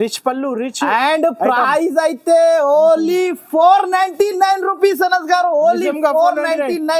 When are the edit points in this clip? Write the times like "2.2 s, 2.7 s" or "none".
none

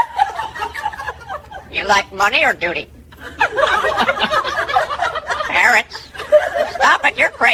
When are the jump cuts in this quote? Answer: none

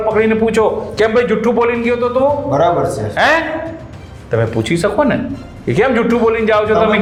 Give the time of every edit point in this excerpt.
none

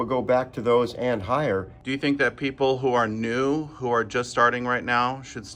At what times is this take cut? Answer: 1.8 s

